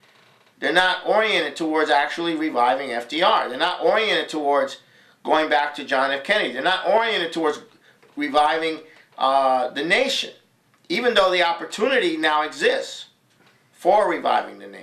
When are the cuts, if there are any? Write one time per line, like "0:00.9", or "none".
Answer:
0:04.9